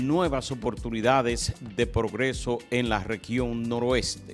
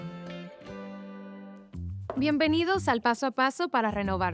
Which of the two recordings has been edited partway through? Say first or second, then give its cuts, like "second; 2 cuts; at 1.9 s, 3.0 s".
second; 1 cut; at 1.4 s